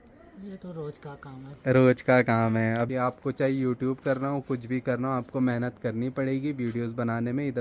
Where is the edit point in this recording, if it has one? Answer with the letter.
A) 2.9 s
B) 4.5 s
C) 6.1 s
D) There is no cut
A